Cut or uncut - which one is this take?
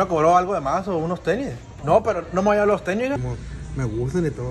cut